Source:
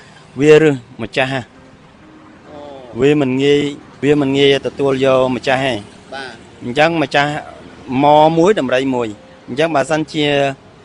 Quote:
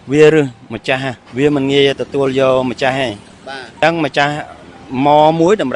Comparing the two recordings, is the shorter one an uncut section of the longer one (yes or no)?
no